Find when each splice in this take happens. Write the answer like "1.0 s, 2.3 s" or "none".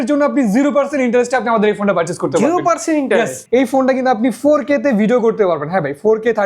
3.4 s